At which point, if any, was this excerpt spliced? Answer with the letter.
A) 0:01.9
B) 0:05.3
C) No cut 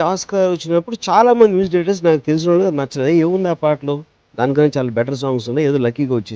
C